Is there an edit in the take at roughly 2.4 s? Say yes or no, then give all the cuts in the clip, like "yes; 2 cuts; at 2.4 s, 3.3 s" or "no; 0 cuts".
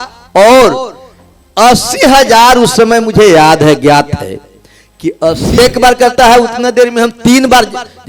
no; 1 cut; at 5.6 s